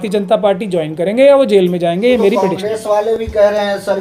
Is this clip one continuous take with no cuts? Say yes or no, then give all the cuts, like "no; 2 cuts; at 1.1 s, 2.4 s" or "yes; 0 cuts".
yes; 0 cuts